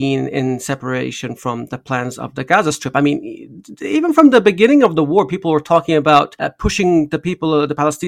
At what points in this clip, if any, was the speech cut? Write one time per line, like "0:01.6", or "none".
none